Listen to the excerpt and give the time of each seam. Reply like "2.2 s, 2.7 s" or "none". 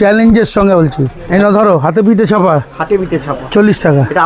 1.3 s